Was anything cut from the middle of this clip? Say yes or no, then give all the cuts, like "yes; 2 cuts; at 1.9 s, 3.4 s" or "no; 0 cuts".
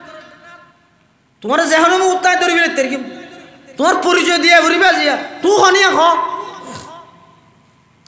no; 0 cuts